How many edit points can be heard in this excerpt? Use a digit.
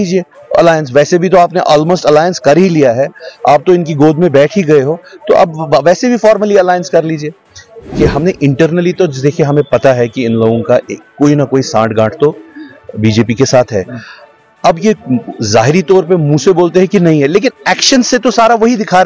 1